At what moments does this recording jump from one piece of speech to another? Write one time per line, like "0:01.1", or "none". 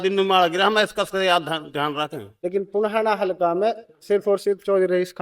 0:02.2